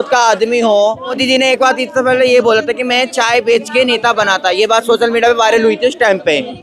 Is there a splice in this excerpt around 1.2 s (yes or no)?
yes